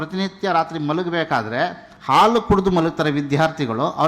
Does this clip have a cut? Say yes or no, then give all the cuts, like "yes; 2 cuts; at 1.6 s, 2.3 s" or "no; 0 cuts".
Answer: no; 0 cuts